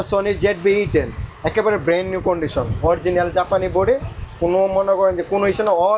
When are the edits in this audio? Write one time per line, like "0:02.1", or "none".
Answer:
none